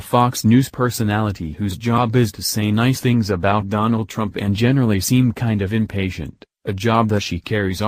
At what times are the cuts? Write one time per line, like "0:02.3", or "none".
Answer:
none